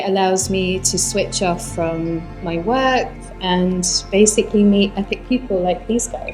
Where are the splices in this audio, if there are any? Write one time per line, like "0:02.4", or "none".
none